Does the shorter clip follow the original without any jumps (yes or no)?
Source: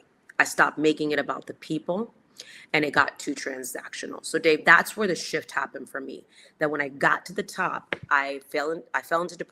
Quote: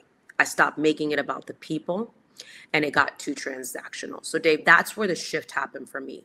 yes